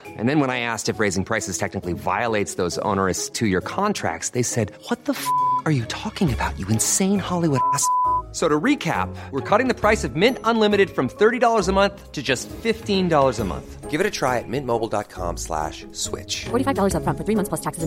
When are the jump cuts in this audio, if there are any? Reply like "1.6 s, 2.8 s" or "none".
none